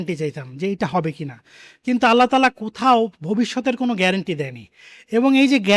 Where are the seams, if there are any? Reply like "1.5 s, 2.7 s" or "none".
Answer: none